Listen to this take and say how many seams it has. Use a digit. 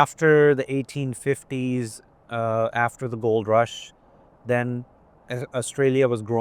0